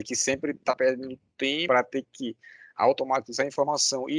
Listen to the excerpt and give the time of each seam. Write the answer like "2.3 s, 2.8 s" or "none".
1.6 s